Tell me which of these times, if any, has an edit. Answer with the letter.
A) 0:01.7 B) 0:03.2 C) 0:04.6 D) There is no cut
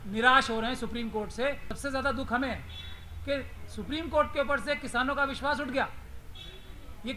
A